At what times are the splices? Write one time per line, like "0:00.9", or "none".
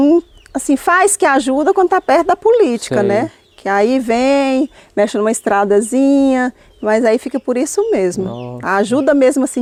none